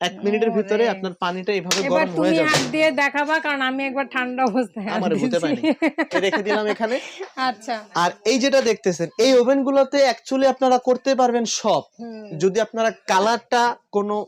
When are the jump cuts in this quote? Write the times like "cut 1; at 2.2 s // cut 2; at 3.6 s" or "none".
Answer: none